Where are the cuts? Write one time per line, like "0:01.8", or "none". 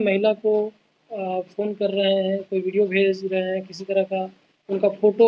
none